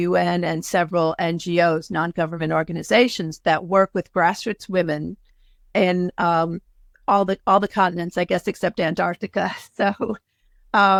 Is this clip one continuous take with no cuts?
yes; 0 cuts

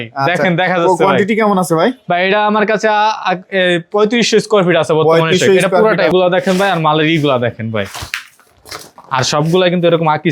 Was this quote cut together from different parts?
yes; 1 cut; at 6.1 s

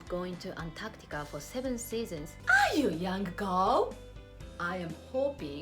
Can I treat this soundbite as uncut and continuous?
no; 1 cut; at 2.3 s

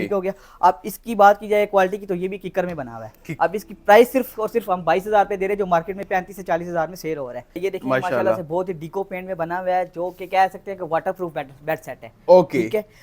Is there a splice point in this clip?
yes; 2 cuts; at 3.3 s, 7.6 s

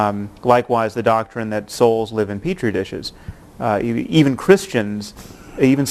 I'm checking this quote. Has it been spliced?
no; 0 cuts

